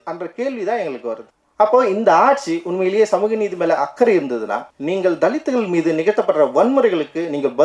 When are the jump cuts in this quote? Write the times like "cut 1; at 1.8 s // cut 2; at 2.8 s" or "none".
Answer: cut 1; at 1.4 s // cut 2; at 4.7 s